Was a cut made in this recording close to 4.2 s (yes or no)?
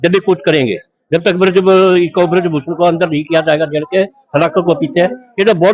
no